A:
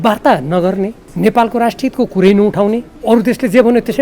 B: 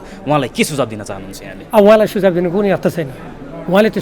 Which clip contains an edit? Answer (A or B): A